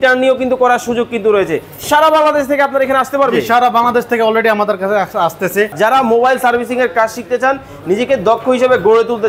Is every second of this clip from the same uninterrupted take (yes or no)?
no